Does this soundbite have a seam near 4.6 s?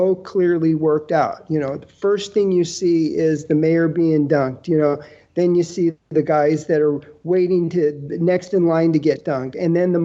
no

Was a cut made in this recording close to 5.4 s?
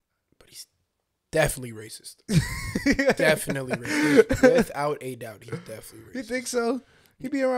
no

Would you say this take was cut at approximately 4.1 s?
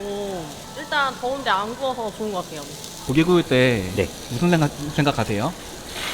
no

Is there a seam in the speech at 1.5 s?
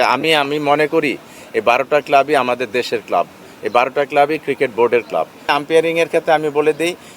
no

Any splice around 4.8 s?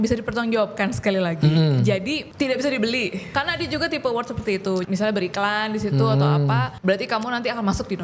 yes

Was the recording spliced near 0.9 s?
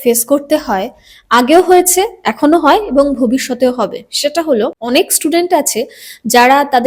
no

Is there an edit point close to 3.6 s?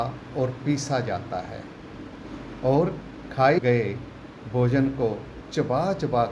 yes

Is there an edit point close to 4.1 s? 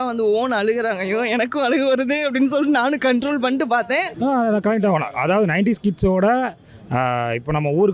yes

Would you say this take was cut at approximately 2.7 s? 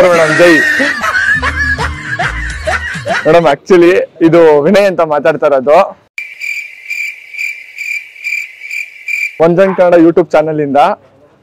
no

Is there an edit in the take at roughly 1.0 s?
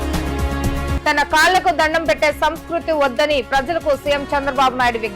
yes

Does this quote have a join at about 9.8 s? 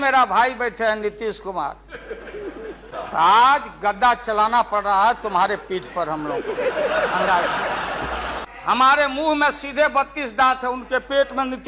no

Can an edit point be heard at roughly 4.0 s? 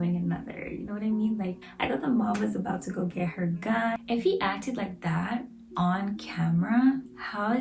yes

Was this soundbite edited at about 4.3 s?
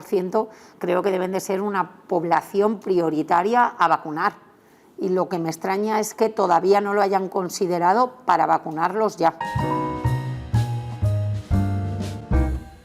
no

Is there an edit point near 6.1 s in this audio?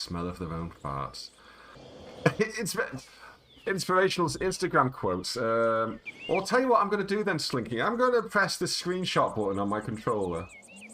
yes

